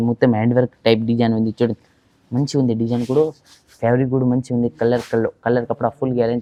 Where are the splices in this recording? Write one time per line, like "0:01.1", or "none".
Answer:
none